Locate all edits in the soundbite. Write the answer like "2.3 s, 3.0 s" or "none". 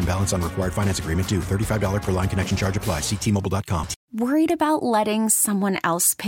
4.0 s